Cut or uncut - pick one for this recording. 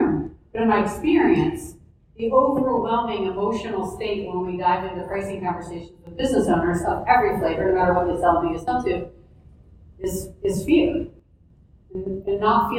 uncut